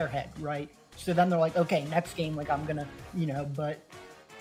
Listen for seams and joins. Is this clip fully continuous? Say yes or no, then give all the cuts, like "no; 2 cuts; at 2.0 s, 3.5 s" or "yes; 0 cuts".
yes; 0 cuts